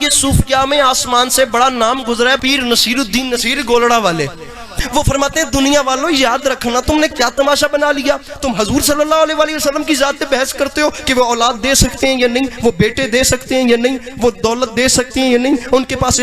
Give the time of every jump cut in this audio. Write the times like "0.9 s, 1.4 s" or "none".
2.4 s, 4.7 s